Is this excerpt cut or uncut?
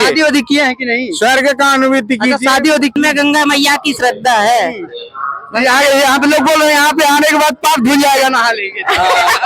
cut